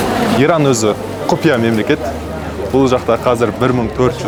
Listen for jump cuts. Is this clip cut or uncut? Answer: uncut